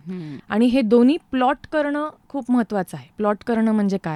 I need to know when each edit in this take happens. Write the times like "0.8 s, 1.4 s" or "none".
none